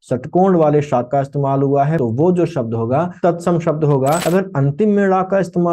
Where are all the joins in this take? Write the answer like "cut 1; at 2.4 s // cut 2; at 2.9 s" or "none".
cut 1; at 2.0 s // cut 2; at 3.1 s // cut 3; at 4.2 s

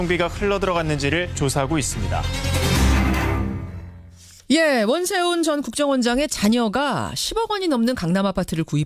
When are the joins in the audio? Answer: none

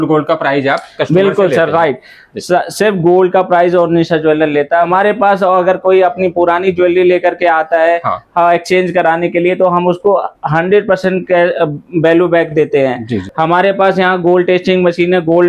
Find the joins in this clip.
cut 1; at 4.9 s // cut 2; at 13.2 s

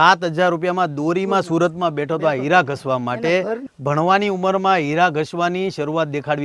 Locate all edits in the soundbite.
cut 1; at 3.7 s

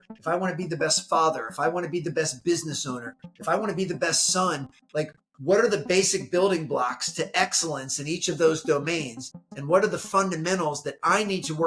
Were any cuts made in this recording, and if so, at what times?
none

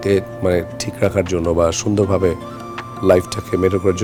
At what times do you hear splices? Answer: none

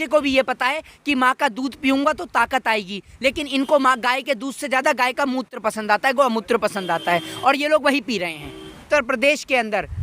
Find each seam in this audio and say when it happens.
cut 1; at 8.8 s

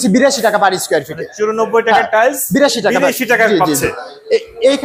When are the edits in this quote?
none

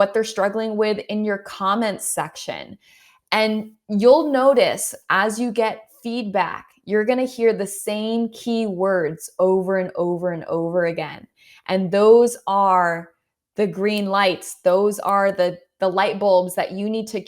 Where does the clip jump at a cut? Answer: none

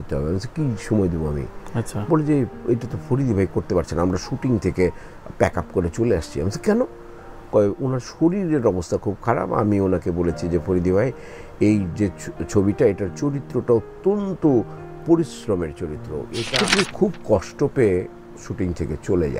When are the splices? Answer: cut 1; at 16.4 s

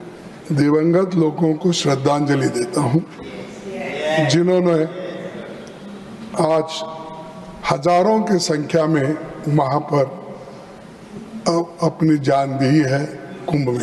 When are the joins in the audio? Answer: none

